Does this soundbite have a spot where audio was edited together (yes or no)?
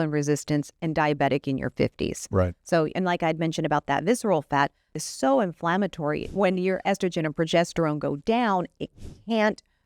yes